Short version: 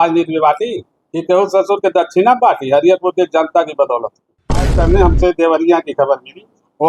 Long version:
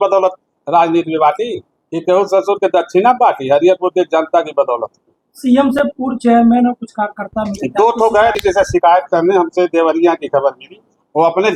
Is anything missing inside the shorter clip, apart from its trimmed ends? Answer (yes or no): yes